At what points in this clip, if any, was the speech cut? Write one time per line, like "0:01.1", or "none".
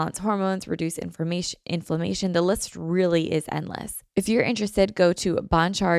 0:04.0